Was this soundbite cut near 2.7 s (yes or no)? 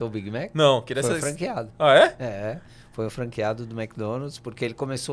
no